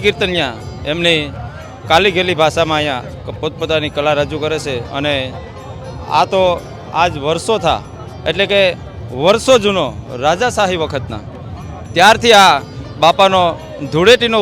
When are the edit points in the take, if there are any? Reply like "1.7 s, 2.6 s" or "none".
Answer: none